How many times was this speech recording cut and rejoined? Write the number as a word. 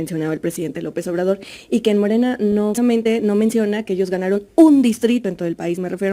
one